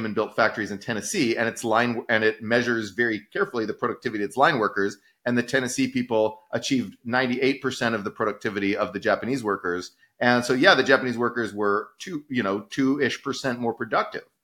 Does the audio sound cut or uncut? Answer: uncut